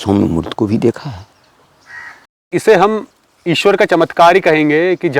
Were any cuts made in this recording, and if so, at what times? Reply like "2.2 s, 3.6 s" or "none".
2.5 s